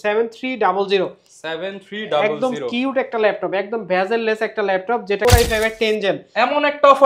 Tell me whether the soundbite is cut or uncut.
cut